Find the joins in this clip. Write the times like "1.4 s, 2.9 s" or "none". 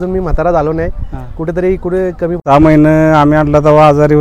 2.4 s